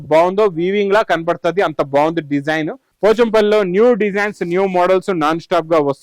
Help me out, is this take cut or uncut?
cut